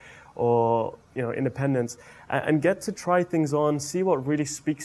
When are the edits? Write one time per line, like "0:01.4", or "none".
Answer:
0:01.0